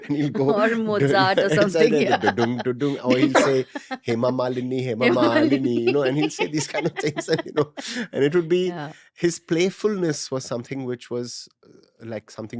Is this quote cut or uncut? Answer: uncut